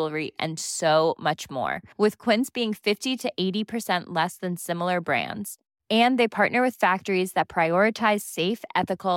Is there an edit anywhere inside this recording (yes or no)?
no